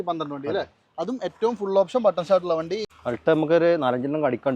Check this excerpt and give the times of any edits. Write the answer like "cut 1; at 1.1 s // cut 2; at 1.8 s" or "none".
cut 1; at 2.9 s